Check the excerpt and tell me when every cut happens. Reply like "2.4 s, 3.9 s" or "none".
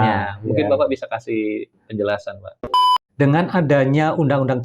2.6 s